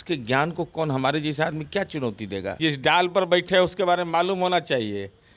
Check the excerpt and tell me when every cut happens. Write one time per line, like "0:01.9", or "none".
0:02.6